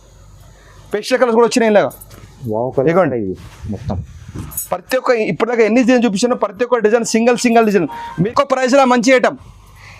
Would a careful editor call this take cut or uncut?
cut